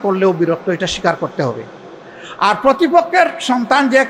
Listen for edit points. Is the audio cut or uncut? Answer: uncut